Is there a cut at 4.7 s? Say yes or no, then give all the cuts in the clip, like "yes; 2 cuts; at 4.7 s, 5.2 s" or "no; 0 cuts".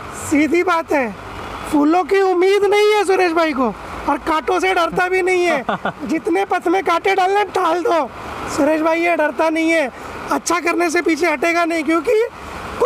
no; 0 cuts